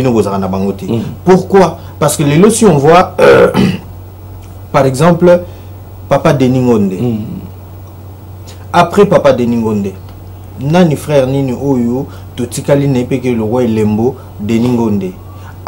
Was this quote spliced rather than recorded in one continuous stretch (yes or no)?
no